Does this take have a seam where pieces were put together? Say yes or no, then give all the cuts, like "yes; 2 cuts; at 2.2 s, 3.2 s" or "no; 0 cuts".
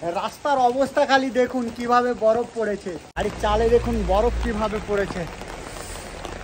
yes; 1 cut; at 3.0 s